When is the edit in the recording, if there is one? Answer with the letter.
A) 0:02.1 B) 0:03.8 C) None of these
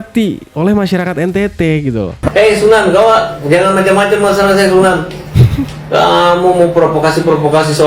A